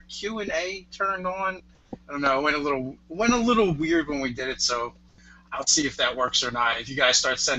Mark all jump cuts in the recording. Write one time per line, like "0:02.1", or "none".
0:00.9